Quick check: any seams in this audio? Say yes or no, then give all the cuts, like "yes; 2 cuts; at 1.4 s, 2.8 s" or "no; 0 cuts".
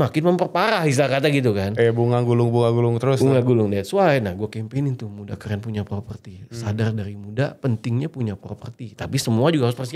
no; 0 cuts